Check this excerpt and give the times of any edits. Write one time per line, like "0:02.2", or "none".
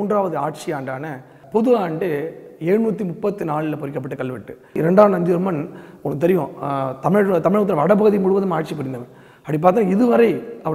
0:01.4
0:04.8

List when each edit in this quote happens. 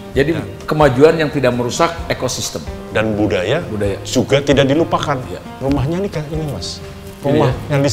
0:02.8
0:05.4

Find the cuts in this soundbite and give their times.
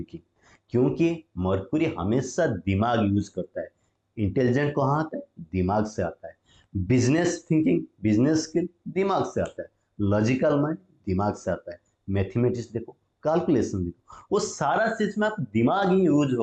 none

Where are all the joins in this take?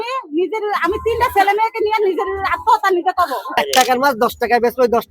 0:03.6

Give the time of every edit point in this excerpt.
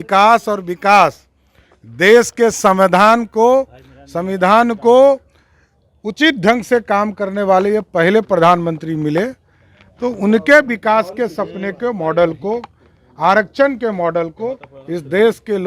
none

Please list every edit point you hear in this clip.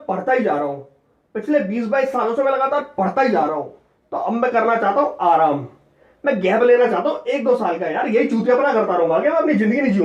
none

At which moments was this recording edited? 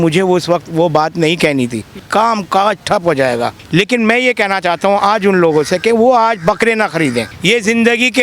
0:02.0
0:03.6
0:07.3

